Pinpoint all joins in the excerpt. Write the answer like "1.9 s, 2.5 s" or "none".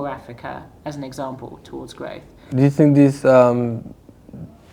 none

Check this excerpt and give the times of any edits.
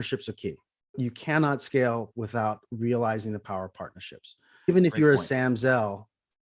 1.0 s, 4.7 s

